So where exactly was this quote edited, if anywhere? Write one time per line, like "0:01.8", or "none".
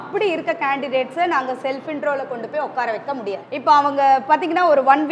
0:03.5